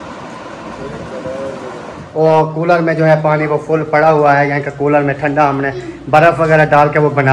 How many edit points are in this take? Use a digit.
1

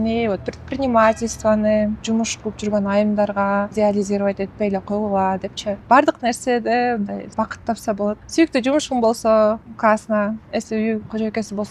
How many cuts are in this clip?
6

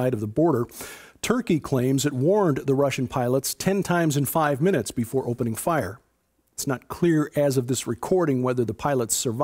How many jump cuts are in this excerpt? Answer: 1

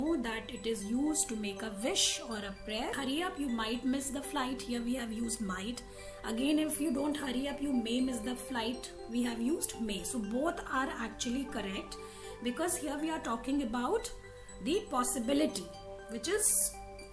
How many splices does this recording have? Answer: 1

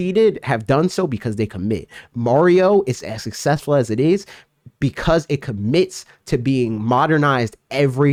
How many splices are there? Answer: 0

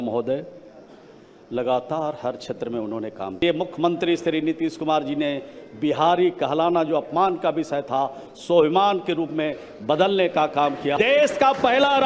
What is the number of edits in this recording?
2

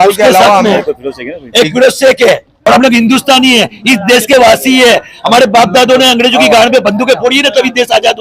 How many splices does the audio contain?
1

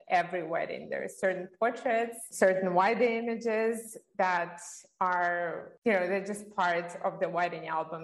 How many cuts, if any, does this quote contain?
2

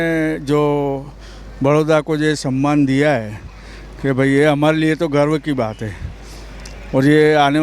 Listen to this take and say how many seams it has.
0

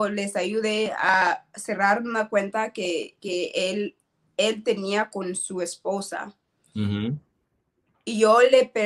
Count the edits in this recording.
0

